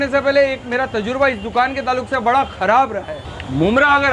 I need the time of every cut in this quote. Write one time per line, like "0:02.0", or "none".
0:03.2